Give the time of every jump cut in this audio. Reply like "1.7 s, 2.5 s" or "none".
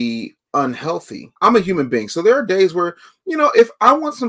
1.3 s